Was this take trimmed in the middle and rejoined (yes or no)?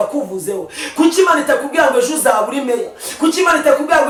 no